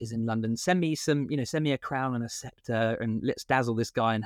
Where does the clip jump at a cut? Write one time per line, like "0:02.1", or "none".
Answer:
none